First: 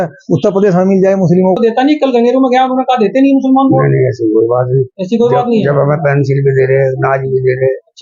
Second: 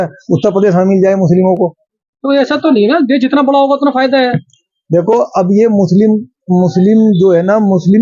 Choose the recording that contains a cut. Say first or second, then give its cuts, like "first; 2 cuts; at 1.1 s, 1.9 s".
first; 1 cut; at 1.6 s